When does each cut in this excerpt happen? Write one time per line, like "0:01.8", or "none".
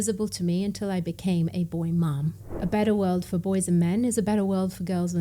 0:02.4

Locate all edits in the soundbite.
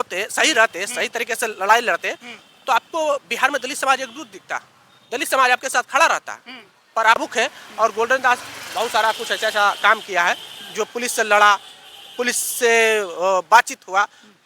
0:07.2

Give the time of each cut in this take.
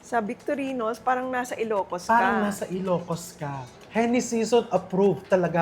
0:03.7

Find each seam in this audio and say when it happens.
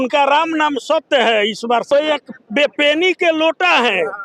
0:01.9

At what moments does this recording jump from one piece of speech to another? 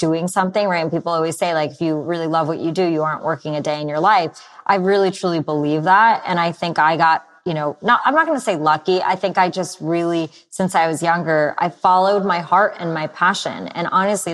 none

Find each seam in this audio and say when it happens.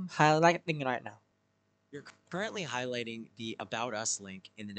none

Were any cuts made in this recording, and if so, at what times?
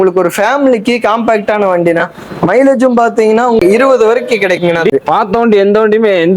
0:03.6
0:04.9

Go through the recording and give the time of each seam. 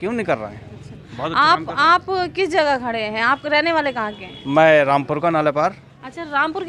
none

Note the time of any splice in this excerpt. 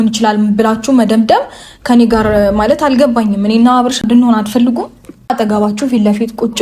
0:04.0
0:05.3

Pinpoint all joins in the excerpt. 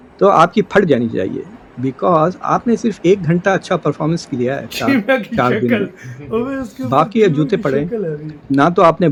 none

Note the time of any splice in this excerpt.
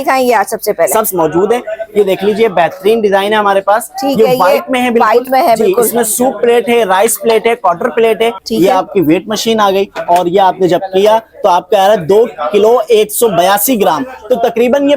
0:01.1
0:08.4

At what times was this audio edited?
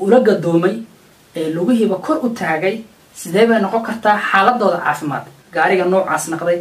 0:05.4

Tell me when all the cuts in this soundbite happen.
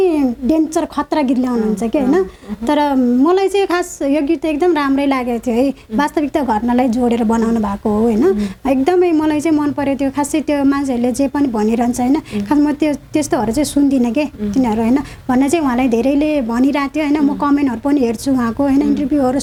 none

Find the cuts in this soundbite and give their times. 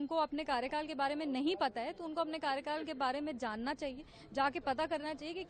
none

